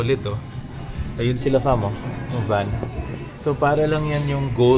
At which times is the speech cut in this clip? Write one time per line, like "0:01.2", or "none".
0:03.3